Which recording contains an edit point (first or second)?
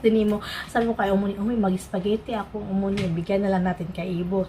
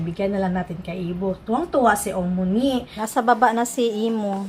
second